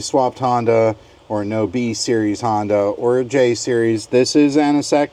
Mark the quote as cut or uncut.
uncut